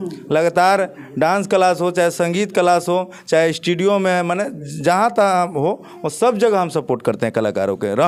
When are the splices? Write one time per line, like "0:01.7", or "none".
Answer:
none